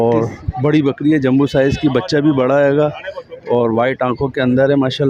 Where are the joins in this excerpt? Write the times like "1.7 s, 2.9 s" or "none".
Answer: none